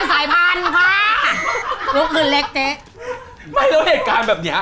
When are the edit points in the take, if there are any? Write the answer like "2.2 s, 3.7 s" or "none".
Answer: none

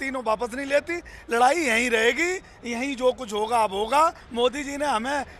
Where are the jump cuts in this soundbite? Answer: 4.2 s

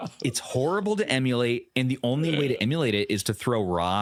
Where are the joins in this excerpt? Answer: none

